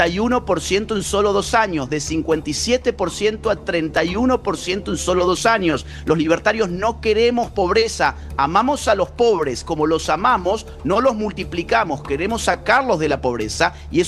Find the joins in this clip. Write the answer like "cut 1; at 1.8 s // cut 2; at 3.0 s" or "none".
none